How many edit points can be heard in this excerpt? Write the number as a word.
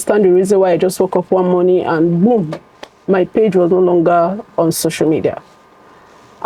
zero